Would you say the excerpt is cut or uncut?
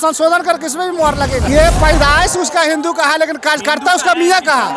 cut